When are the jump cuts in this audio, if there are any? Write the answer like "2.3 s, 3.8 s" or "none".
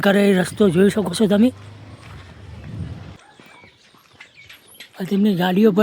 3.2 s, 4.9 s